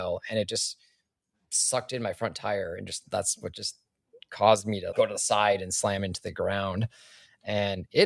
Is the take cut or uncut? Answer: uncut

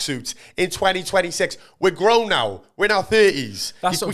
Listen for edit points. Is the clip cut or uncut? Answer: uncut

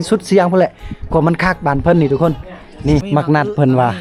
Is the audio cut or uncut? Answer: cut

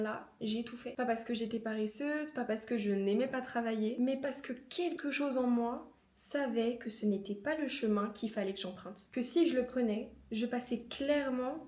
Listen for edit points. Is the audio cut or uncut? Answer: uncut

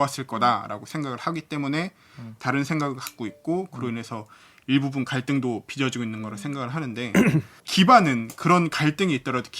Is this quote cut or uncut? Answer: cut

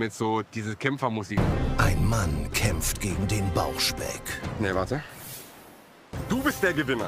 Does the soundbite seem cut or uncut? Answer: uncut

